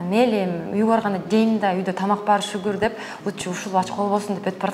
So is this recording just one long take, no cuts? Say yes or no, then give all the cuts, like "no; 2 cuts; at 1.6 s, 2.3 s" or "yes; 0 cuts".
yes; 0 cuts